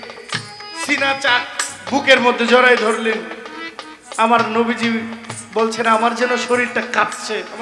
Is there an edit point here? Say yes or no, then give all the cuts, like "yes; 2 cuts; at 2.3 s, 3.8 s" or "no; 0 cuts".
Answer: no; 0 cuts